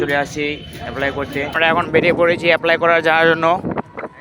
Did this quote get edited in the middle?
yes; 1 cut; at 1.6 s

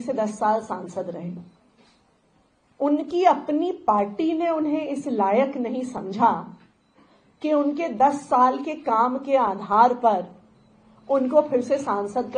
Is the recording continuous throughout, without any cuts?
yes; 0 cuts

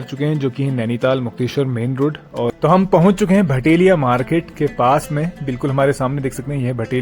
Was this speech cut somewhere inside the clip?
yes; 1 cut; at 2.5 s

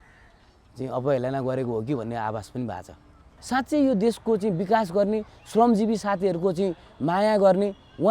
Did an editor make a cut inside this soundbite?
yes; 1 cut; at 3.3 s

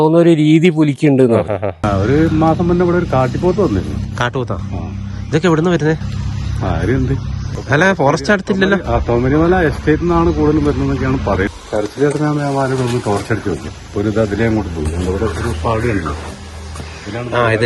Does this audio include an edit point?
yes; 5 cuts; at 1.8 s, 7.5 s, 11.5 s, 13.7 s, 16.2 s

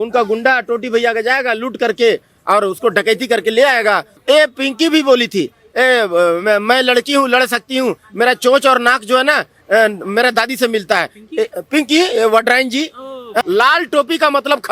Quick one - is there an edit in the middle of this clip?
yes; 2 cuts; at 4.1 s, 13.4 s

